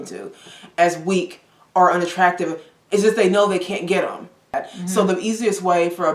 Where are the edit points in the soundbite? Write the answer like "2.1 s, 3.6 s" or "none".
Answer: 4.7 s